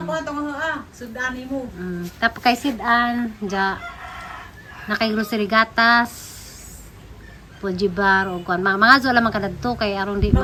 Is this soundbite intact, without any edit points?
yes; 0 cuts

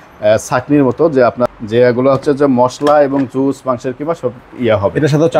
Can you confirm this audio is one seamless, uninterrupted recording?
no; 1 cut; at 1.4 s

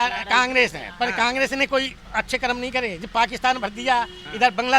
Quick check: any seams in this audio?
yes; 1 cut; at 2.0 s

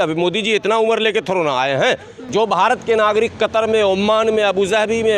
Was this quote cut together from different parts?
yes; 1 cut; at 2.1 s

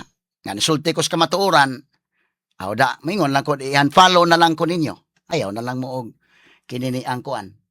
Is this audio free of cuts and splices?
no; 1 cut; at 5.3 s

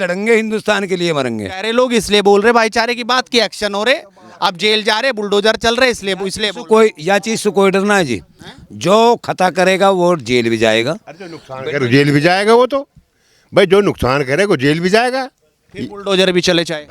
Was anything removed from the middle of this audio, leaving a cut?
yes; 1 cut; at 1.6 s

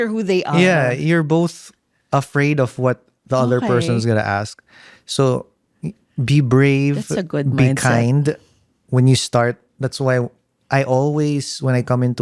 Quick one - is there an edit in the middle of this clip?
no; 0 cuts

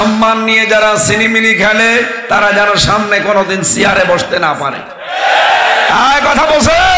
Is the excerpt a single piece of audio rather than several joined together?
yes; 0 cuts

